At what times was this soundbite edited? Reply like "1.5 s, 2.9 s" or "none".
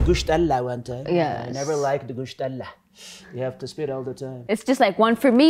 4.3 s